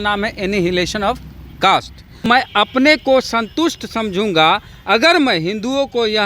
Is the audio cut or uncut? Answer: cut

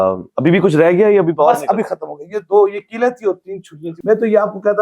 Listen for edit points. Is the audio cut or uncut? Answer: cut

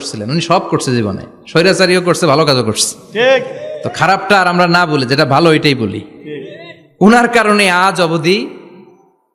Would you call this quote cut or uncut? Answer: uncut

